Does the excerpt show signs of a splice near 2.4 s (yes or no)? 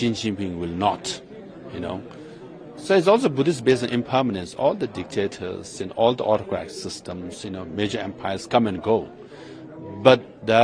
no